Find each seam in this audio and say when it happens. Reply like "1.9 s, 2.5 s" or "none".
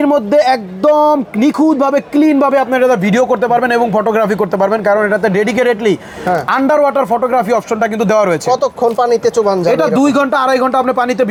none